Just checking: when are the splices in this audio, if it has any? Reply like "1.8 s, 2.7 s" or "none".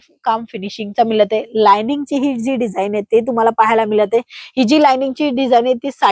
none